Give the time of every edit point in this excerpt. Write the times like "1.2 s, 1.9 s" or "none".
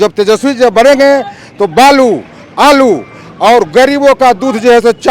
none